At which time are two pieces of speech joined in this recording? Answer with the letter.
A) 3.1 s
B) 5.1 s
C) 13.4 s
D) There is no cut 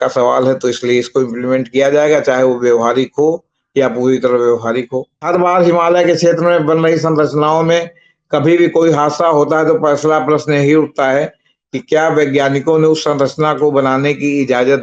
B